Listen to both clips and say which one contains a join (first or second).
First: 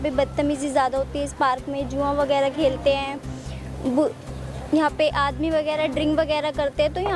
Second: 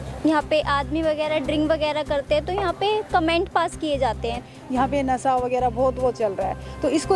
second